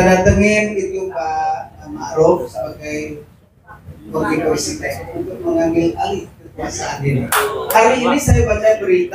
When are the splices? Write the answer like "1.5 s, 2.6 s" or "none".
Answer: 7.7 s

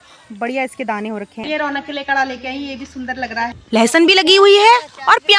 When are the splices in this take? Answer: 1.4 s, 3.6 s

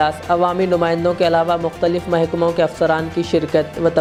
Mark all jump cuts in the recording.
none

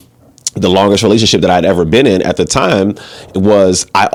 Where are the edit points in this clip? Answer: none

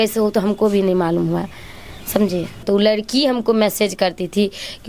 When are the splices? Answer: 2.6 s

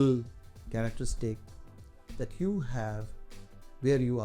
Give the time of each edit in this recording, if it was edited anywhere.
none

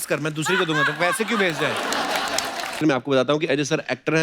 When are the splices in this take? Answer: 2.8 s

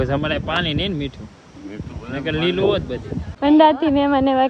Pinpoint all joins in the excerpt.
3.2 s

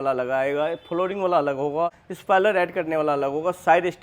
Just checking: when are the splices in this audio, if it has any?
2.1 s

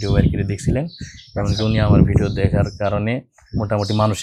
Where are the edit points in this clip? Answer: none

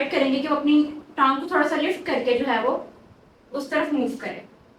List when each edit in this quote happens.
none

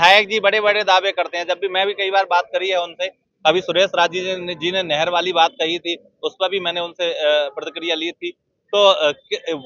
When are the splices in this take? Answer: none

